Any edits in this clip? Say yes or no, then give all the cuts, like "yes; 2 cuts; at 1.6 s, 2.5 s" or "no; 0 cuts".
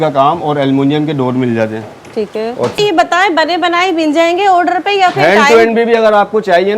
yes; 1 cut; at 2.8 s